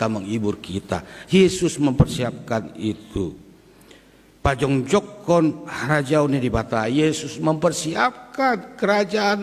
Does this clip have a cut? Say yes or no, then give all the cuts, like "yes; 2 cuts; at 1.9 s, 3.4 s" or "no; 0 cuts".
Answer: no; 0 cuts